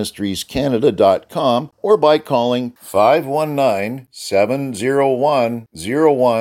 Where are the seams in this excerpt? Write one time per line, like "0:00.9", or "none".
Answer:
0:01.7